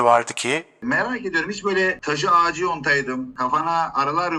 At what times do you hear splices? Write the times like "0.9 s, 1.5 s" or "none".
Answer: 0.8 s, 2.0 s, 3.3 s